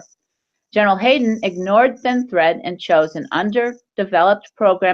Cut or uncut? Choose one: uncut